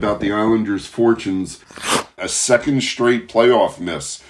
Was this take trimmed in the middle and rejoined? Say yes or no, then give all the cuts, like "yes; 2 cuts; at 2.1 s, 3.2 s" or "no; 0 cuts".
yes; 1 cut; at 1.9 s